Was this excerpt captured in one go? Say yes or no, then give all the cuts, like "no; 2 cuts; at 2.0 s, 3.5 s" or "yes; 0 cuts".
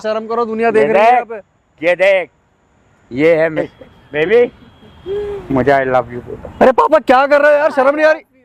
no; 1 cut; at 3.7 s